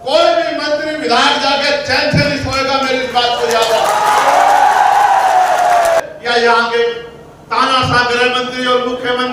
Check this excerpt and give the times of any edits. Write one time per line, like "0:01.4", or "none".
0:06.0